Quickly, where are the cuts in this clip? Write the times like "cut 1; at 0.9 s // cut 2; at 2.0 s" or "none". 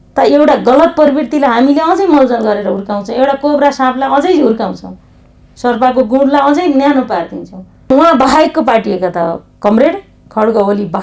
cut 1; at 7.9 s